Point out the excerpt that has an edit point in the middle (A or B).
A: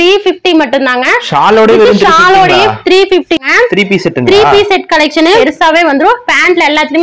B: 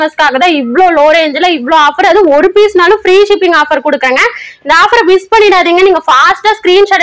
A